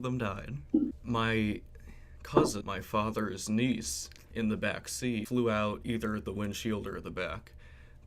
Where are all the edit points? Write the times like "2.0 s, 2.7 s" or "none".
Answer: 1.0 s, 2.6 s, 5.3 s